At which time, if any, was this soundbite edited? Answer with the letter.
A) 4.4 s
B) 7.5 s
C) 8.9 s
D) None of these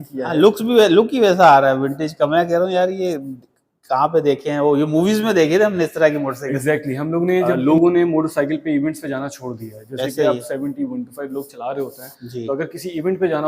B